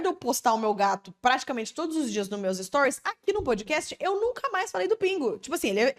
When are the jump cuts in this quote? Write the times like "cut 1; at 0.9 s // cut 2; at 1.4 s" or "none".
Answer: none